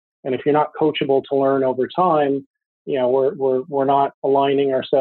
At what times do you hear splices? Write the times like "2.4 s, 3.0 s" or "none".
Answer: none